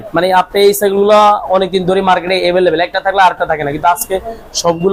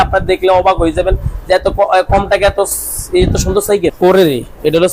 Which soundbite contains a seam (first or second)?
second